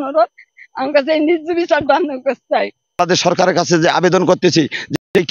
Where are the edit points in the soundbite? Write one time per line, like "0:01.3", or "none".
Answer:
0:03.1